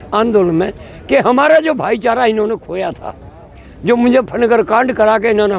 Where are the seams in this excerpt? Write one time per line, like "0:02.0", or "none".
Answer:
none